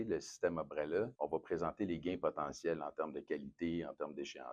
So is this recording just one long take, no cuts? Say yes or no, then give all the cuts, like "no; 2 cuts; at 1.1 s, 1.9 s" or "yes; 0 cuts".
no; 1 cut; at 1.1 s